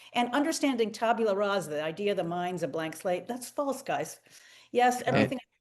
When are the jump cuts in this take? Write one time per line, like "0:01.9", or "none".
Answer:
none